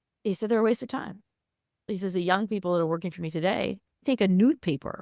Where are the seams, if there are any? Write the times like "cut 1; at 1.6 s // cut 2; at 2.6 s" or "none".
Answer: cut 1; at 1.9 s // cut 2; at 4.0 s